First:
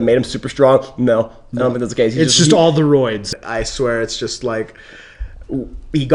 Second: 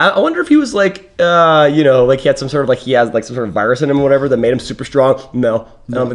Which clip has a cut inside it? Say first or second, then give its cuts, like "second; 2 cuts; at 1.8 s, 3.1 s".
first; 1 cut; at 3.2 s